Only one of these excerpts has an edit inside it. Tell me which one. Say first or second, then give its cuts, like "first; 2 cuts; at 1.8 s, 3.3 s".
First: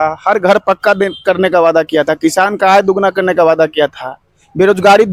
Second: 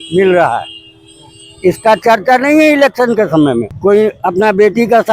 second; 1 cut; at 3.7 s